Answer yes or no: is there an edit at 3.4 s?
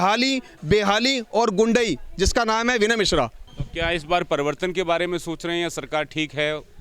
yes